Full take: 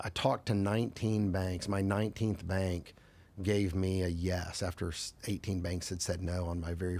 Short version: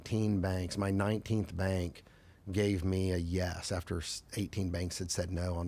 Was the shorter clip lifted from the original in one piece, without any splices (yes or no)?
yes